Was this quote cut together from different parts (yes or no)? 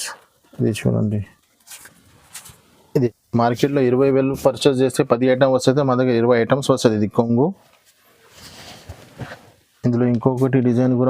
yes